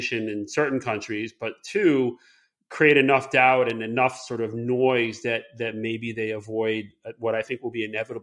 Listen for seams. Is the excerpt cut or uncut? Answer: uncut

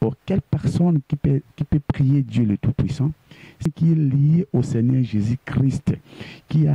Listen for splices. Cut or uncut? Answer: cut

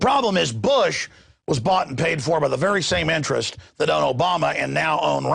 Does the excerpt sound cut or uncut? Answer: cut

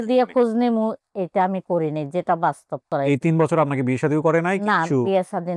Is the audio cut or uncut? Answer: cut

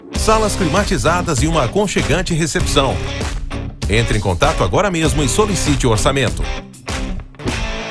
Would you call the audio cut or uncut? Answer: uncut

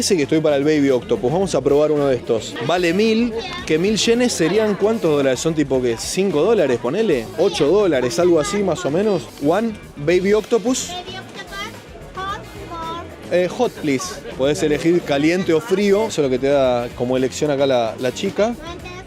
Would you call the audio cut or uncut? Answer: uncut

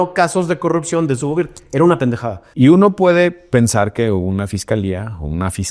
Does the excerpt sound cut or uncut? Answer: cut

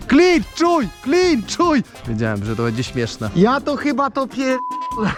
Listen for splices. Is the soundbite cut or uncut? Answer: uncut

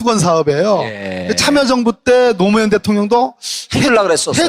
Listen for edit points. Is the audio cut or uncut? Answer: cut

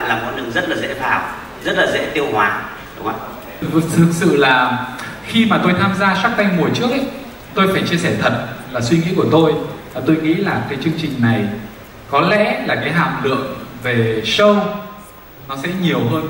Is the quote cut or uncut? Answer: cut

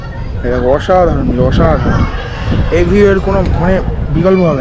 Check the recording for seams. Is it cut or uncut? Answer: uncut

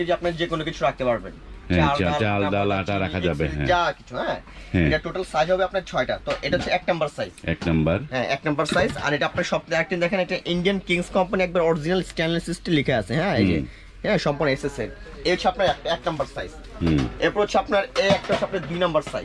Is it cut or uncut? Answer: uncut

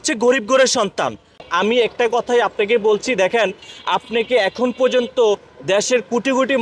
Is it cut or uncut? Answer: cut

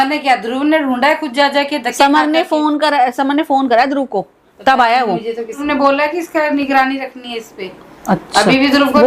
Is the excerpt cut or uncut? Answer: cut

